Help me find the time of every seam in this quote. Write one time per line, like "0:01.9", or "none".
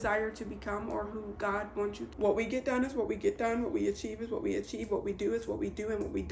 0:02.1

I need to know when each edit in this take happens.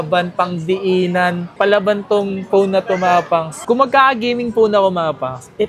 0:03.6

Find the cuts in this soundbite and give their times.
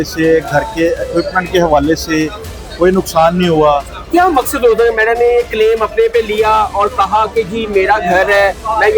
0:03.9

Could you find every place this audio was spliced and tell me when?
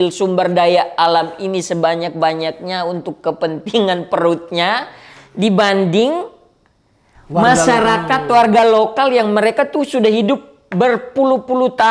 none

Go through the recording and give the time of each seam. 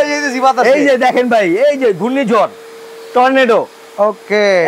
none

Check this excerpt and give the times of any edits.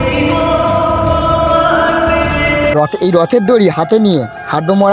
0:02.7

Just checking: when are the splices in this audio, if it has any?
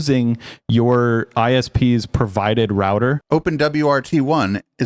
0:03.2

